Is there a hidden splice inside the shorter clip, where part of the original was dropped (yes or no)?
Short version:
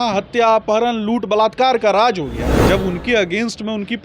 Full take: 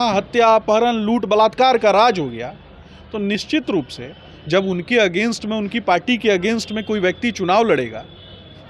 yes